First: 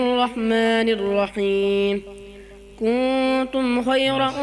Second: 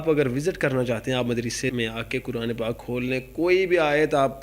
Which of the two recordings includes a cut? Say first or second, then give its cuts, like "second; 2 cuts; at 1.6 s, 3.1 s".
second; 1 cut; at 1.7 s